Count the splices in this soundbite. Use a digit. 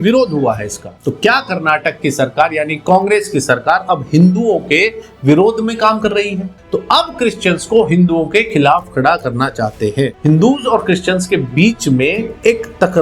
3